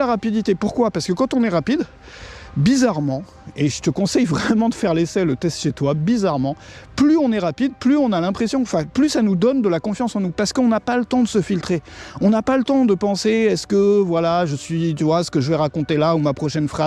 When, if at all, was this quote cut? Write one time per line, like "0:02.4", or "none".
none